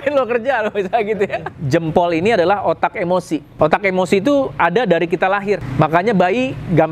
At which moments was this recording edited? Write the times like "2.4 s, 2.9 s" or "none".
1.5 s, 3.5 s, 5.7 s